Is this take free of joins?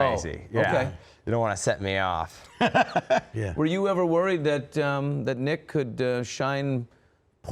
no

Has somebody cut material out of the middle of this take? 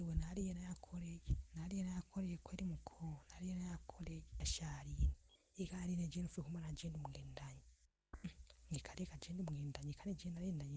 yes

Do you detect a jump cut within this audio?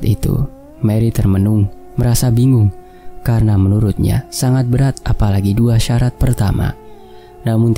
no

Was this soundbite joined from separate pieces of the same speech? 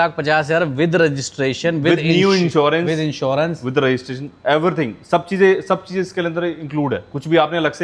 no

